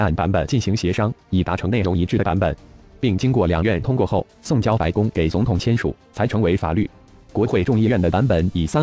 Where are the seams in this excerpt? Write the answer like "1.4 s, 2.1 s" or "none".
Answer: 5.6 s